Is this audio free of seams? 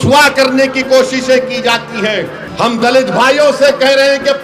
no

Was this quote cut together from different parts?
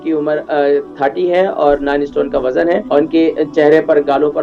yes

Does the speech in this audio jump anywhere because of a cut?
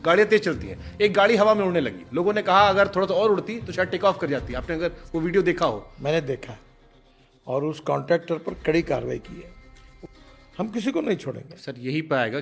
no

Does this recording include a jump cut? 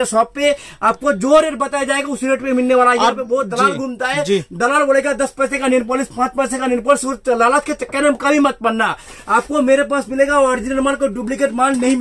no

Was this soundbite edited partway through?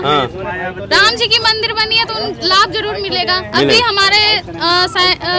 no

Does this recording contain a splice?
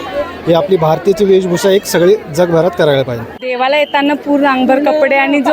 yes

